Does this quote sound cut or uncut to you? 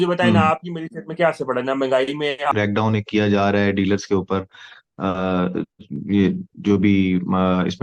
cut